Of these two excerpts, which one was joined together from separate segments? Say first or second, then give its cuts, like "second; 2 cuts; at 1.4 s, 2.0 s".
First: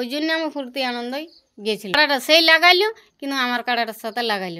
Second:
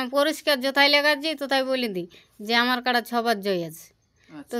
first; 1 cut; at 1.9 s